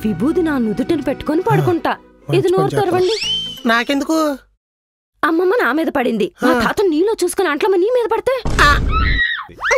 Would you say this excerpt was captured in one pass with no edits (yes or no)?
yes